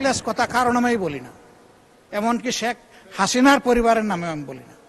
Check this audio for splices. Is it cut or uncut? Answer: uncut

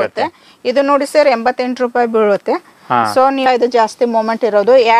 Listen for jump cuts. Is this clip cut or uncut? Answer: cut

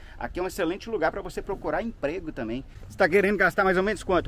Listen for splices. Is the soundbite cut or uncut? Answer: cut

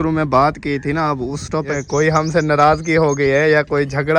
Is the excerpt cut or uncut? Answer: cut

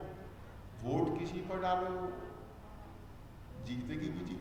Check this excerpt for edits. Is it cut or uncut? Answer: uncut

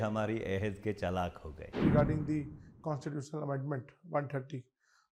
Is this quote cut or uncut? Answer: cut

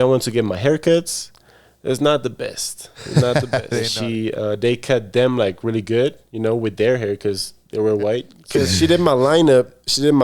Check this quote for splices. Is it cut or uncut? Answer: cut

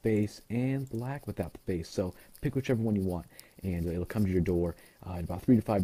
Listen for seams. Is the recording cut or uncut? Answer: uncut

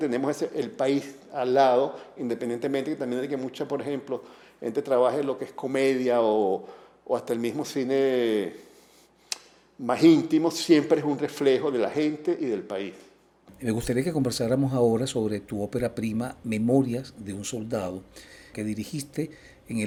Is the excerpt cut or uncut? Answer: uncut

